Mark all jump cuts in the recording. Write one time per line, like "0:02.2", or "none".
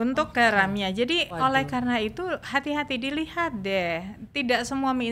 none